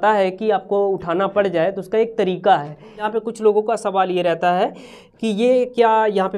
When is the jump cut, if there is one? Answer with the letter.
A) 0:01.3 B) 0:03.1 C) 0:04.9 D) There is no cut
B